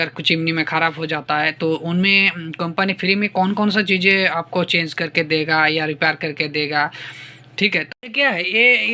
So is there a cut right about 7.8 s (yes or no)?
yes